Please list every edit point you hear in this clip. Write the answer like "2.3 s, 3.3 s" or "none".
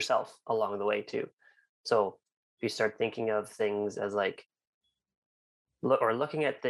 none